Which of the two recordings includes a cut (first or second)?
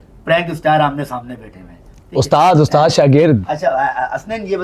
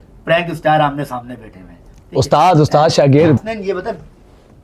second